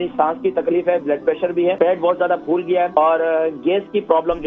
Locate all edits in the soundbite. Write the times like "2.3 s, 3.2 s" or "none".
1.8 s, 2.9 s